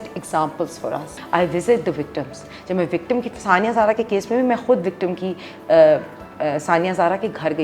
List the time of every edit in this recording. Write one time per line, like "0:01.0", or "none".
0:01.2